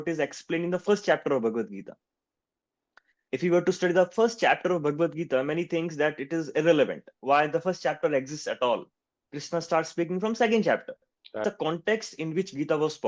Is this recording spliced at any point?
yes; 1 cut; at 11.4 s

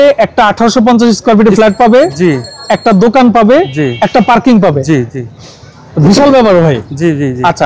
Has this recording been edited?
no; 0 cuts

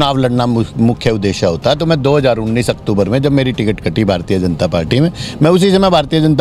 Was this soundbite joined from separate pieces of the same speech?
no; 0 cuts

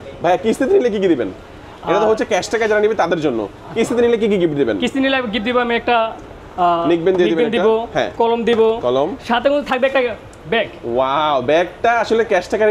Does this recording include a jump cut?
no; 0 cuts

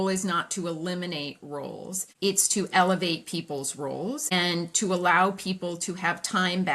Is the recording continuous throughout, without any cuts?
no; 2 cuts; at 2.0 s, 4.3 s

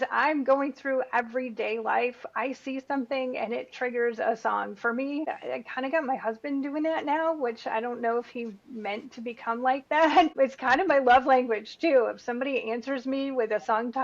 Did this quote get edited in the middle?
yes; 2 cuts; at 5.3 s, 10.3 s

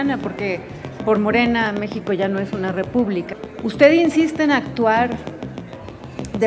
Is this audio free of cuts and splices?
no; 1 cut; at 3.3 s

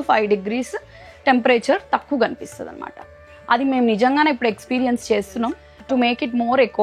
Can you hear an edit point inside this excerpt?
yes; 1 cut; at 5.7 s

